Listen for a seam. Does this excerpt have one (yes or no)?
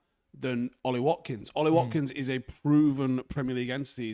no